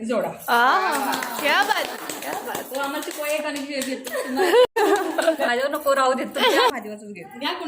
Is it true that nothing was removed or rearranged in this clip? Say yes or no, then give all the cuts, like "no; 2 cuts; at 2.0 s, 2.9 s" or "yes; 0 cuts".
no; 1 cut; at 4.7 s